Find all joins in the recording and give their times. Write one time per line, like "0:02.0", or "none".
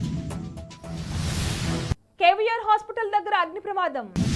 none